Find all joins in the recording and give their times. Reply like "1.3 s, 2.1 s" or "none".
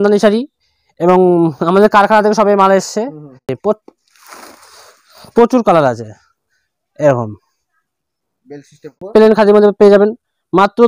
3.5 s, 9.0 s